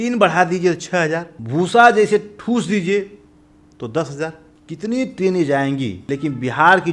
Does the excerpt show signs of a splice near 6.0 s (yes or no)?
yes